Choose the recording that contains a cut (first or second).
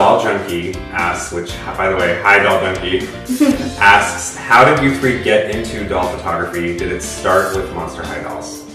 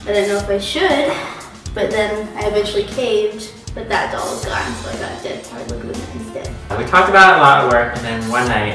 first